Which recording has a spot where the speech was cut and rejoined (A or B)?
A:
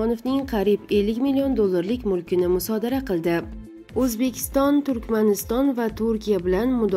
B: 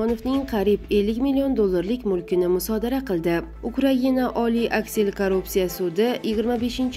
A